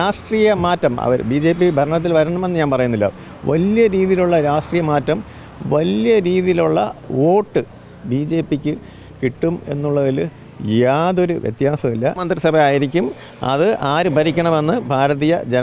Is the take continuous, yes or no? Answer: no